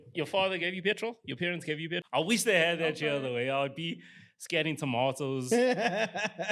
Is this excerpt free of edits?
no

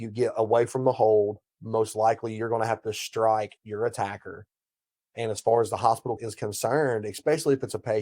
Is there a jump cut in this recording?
yes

